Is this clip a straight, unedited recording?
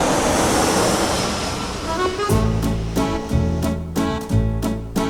yes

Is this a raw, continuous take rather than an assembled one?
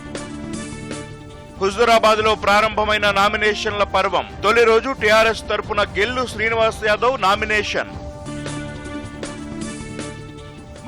no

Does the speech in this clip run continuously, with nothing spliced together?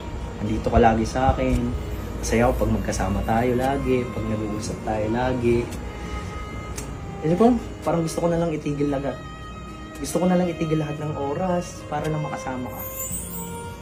yes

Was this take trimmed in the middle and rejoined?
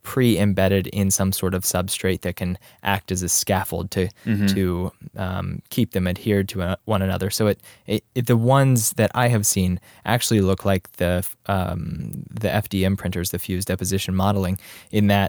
no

